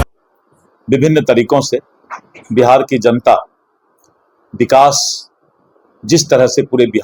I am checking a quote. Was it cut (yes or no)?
no